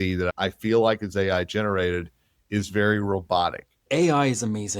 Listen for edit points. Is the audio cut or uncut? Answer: cut